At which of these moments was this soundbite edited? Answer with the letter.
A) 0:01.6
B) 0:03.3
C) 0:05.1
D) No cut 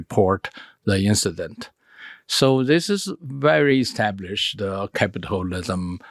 D